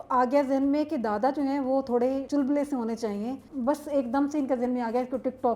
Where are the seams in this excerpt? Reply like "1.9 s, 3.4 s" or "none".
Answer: 2.2 s, 3.5 s